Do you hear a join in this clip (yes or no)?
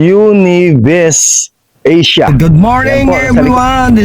yes